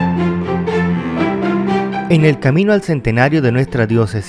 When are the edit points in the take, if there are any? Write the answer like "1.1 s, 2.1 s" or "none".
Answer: 2.1 s

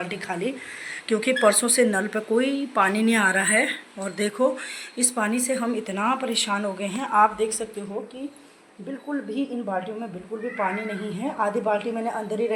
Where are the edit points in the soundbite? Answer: none

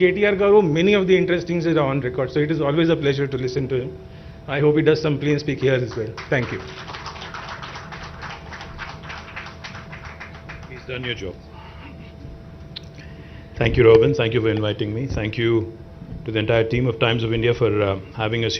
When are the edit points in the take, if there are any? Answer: 17.2 s

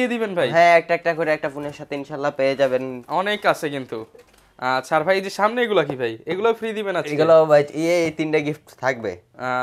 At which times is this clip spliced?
none

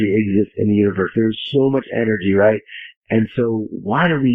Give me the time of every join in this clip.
none

